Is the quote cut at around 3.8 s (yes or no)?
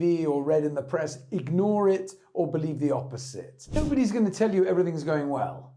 yes